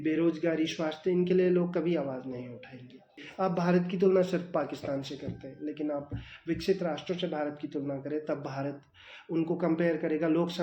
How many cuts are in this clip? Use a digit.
1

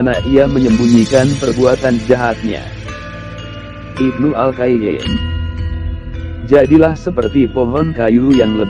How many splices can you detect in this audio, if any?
2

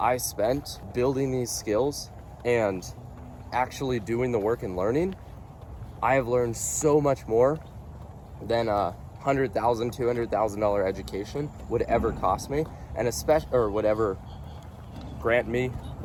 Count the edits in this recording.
0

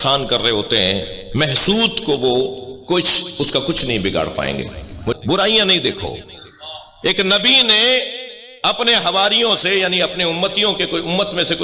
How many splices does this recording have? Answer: 1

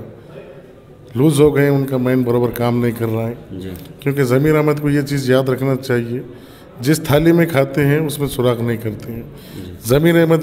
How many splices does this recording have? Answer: 0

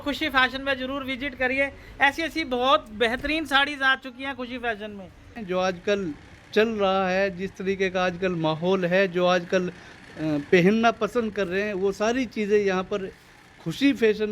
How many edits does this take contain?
1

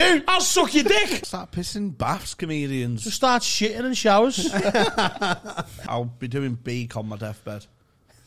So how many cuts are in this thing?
2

